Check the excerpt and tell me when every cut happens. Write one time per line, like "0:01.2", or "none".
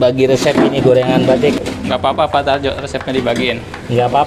0:01.6